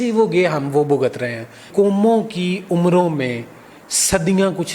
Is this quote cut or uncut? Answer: cut